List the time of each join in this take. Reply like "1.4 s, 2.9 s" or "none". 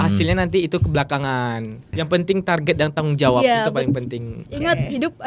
2.0 s